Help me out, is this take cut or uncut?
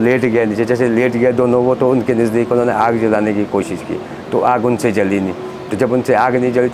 uncut